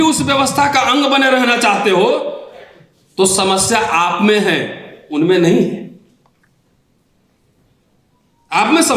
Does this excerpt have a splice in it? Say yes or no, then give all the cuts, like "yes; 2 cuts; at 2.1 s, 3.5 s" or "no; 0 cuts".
no; 0 cuts